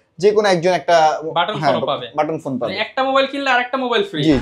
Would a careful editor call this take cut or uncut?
uncut